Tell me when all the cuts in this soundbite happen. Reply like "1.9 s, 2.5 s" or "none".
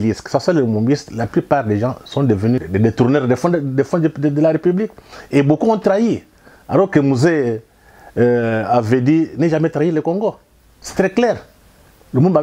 2.6 s